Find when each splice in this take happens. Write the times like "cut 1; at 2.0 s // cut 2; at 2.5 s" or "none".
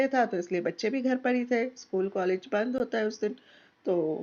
none